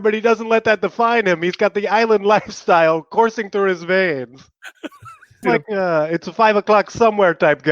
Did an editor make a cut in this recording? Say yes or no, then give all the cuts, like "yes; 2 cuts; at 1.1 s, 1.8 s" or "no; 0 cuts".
yes; 1 cut; at 5.4 s